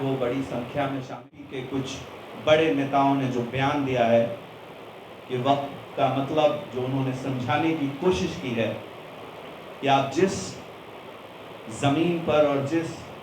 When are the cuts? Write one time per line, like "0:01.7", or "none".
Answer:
0:01.2